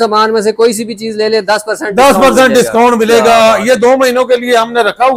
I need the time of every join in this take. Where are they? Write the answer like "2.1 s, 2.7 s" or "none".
none